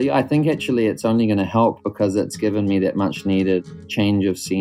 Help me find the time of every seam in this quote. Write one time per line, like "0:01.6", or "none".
0:02.3
0:03.6